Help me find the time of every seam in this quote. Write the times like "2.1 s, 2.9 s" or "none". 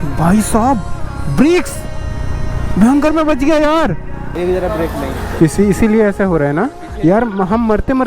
4.3 s